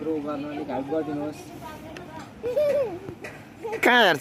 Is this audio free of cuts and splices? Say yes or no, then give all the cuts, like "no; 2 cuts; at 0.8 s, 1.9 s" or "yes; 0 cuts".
yes; 0 cuts